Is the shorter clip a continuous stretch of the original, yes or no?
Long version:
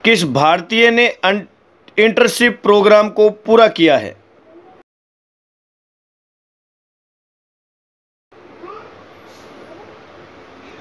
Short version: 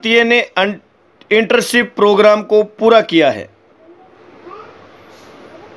no